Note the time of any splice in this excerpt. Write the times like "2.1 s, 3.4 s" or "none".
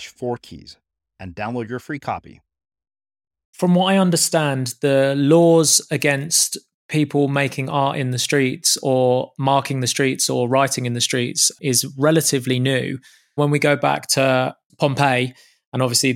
3.5 s, 11.5 s, 13.4 s, 14.6 s